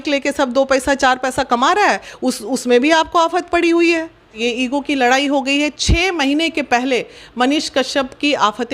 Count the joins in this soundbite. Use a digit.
1